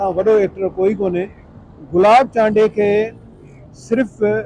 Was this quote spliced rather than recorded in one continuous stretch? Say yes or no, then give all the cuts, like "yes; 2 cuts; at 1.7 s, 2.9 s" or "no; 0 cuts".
no; 0 cuts